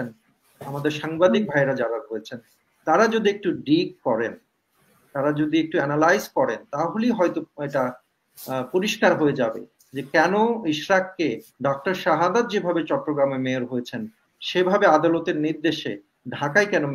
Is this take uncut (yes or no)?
yes